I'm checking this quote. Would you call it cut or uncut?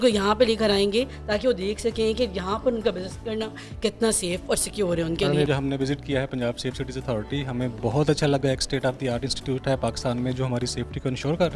cut